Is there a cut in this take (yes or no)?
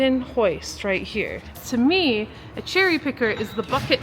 yes